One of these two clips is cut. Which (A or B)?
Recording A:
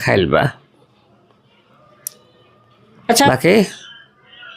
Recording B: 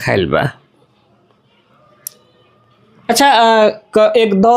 A